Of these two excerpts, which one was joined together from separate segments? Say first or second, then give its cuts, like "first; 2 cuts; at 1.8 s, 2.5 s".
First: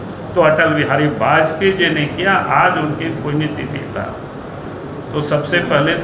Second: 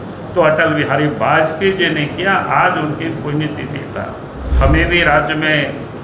second; 1 cut; at 4.4 s